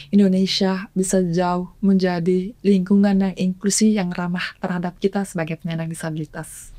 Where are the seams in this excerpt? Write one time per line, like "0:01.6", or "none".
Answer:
none